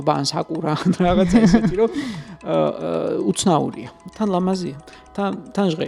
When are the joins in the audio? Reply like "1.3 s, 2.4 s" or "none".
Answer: 4.0 s